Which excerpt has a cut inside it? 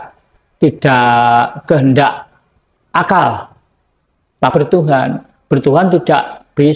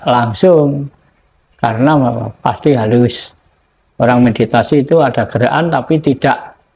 first; 1 cut; at 4.5 s

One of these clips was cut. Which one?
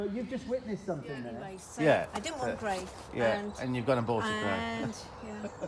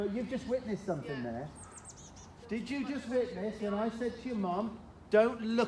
first; 1 cut; at 1.6 s

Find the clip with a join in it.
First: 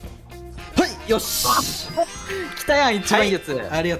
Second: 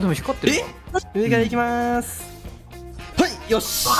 second; 1 cut; at 1.1 s

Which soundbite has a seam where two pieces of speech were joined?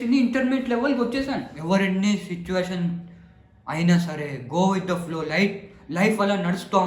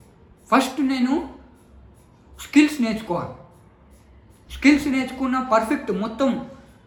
first; 1 cut; at 1.7 s

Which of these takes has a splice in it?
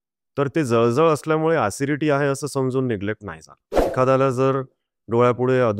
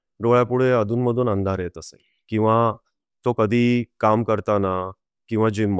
first; 1 cut; at 3.8 s

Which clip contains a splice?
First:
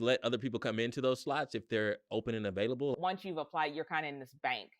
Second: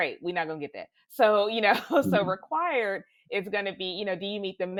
first; 1 cut; at 2.9 s

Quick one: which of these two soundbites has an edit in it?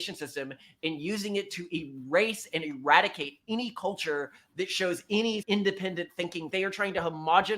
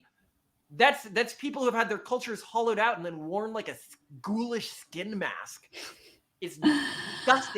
first; 2 cuts; at 5.4 s, 6.5 s

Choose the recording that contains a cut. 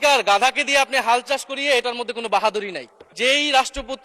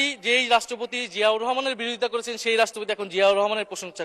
first; 1 cut; at 3.1 s

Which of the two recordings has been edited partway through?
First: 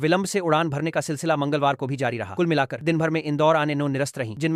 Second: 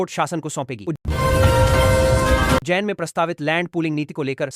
second; 2 cuts; at 1.0 s, 2.6 s

